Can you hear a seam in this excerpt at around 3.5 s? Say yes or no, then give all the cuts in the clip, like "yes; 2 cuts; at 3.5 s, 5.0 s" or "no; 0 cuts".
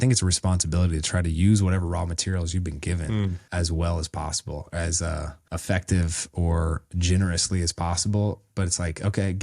yes; 2 cuts; at 3.5 s, 5.4 s